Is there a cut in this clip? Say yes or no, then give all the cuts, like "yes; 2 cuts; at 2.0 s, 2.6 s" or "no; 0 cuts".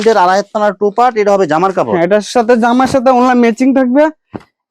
no; 0 cuts